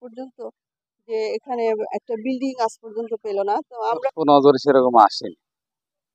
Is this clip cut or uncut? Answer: cut